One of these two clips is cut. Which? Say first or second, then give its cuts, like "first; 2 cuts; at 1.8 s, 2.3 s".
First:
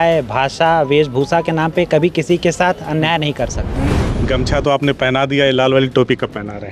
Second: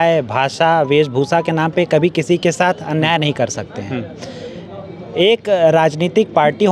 first; 1 cut; at 4.0 s